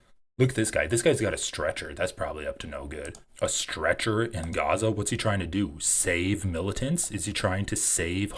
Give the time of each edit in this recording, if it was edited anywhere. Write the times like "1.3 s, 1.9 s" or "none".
3.2 s